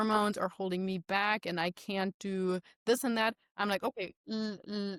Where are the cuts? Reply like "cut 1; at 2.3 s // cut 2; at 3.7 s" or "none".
none